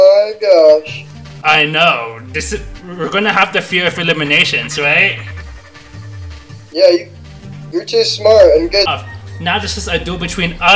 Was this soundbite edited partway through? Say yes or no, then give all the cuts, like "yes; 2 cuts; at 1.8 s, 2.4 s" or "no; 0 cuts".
yes; 1 cut; at 8.9 s